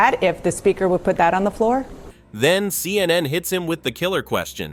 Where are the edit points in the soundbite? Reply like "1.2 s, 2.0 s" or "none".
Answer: none